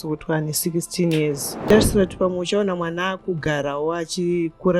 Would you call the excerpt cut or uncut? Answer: cut